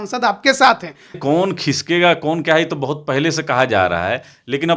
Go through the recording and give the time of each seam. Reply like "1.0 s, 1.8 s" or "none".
1.2 s